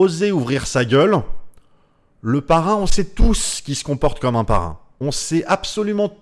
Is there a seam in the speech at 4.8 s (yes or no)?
yes